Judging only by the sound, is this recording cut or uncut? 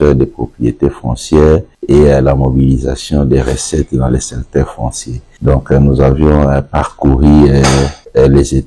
uncut